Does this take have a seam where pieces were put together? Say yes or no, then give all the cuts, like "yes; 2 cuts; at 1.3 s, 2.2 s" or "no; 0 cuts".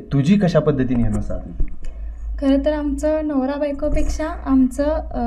no; 0 cuts